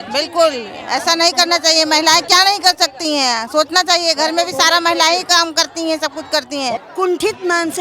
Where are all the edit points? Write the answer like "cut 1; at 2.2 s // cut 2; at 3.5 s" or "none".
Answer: cut 1; at 6.9 s